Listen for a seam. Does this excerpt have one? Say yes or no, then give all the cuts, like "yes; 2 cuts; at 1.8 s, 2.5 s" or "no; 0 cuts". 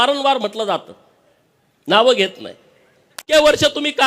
yes; 1 cut; at 3.2 s